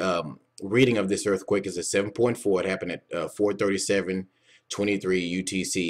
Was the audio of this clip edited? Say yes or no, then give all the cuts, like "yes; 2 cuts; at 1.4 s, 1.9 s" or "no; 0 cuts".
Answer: no; 0 cuts